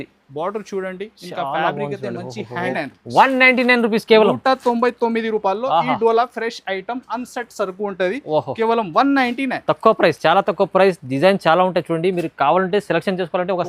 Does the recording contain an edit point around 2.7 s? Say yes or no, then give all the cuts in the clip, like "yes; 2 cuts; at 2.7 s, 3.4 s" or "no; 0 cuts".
yes; 1 cut; at 2.7 s